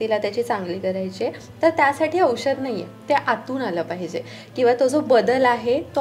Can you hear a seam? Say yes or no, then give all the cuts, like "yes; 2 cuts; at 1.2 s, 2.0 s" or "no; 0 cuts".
no; 0 cuts